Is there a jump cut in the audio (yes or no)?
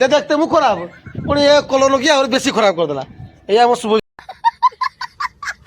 yes